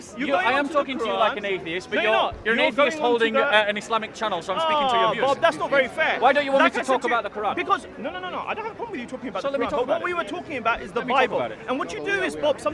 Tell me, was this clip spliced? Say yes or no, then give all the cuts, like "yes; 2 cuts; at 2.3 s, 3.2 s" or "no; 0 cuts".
no; 0 cuts